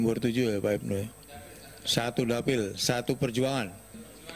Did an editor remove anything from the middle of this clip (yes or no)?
no